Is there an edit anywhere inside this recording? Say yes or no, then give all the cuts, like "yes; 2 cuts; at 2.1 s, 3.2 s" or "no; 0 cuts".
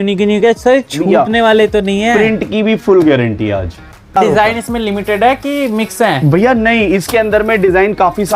yes; 1 cut; at 4.1 s